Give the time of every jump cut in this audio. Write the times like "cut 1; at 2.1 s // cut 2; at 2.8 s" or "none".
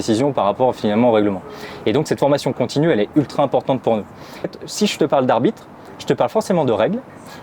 cut 1; at 4.5 s